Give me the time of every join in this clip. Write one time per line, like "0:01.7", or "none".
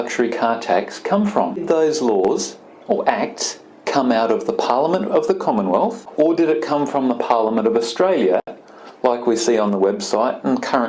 0:01.6
0:06.0